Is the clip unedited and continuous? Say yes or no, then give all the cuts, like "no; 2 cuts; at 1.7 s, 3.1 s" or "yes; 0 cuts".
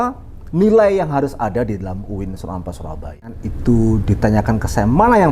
no; 1 cut; at 3.5 s